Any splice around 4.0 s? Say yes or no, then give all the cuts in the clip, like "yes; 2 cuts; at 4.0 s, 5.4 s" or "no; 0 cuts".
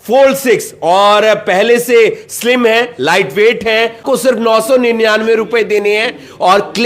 yes; 1 cut; at 4.0 s